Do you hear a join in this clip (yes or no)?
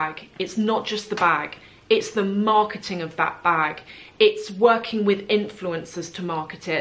no